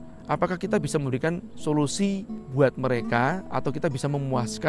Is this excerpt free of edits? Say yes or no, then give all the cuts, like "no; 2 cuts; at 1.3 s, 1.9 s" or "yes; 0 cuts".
no; 1 cut; at 2.4 s